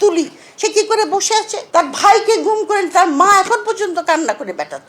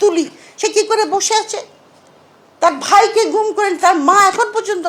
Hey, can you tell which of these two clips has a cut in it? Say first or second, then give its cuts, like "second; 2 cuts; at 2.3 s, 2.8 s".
first; 1 cut; at 1.6 s